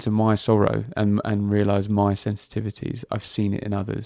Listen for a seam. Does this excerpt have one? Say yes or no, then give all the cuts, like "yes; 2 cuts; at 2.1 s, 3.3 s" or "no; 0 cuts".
no; 0 cuts